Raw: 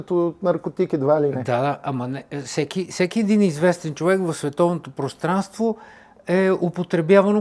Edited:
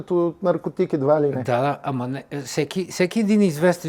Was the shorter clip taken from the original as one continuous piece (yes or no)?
yes